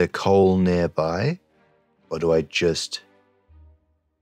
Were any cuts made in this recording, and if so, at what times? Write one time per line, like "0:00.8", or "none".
0:03.3